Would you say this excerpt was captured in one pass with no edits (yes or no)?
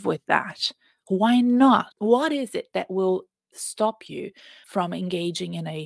no